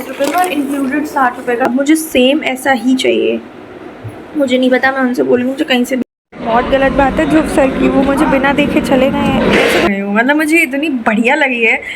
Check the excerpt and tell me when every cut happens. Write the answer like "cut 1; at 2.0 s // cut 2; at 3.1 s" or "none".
cut 1; at 1.7 s // cut 2; at 6.0 s // cut 3; at 9.9 s